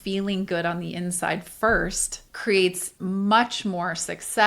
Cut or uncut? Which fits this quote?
cut